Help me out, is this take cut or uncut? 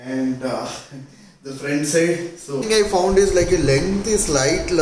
cut